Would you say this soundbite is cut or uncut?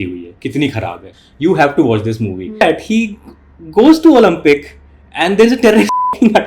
cut